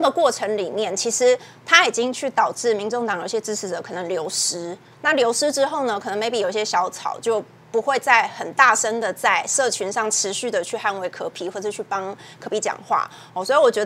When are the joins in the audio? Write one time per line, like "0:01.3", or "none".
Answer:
none